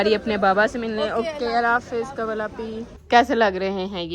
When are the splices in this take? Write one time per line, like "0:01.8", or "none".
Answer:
0:02.9